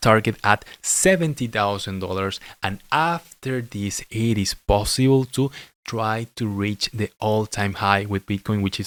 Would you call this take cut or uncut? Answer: uncut